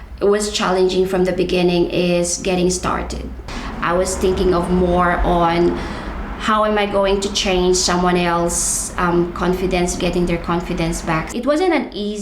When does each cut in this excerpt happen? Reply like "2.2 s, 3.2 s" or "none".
3.5 s, 9.9 s, 11.3 s